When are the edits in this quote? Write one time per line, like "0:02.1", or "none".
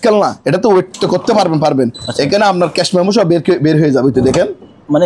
none